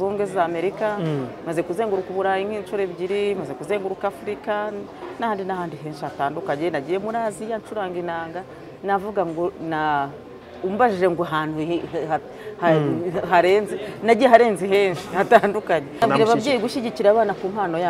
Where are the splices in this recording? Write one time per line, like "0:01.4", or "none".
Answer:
0:16.0